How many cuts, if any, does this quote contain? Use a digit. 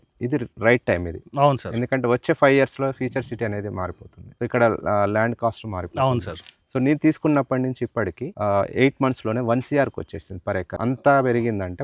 0